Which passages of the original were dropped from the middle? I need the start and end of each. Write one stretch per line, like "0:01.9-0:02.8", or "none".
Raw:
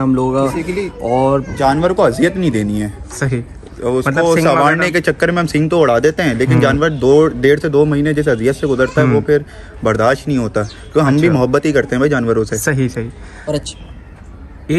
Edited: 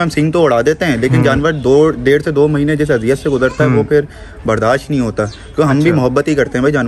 none